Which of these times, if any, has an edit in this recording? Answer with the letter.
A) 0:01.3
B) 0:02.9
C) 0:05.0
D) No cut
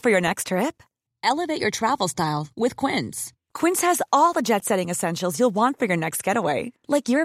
D